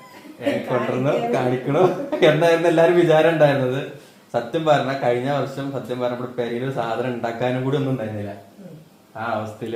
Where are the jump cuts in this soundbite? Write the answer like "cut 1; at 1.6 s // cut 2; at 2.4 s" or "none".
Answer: none